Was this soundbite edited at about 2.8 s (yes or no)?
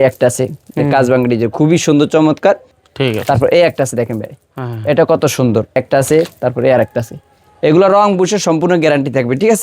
yes